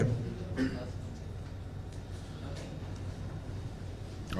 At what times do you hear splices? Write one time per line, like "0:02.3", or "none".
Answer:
none